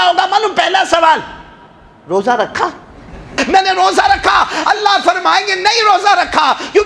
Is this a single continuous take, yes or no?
no